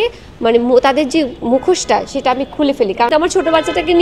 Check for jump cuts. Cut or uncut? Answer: cut